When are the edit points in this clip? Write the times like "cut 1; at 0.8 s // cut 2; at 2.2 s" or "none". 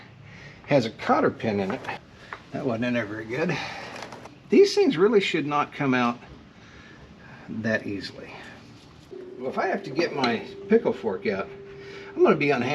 cut 1; at 2.0 s // cut 2; at 4.3 s // cut 3; at 9.2 s